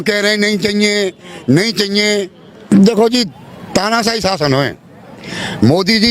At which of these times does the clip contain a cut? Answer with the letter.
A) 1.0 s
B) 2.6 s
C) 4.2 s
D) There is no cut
B